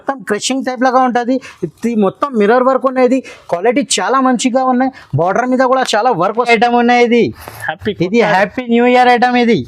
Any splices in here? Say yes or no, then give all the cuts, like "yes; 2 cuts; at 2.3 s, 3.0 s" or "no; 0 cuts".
yes; 1 cut; at 6.5 s